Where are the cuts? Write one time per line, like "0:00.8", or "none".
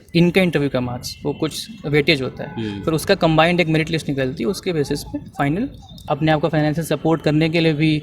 0:06.0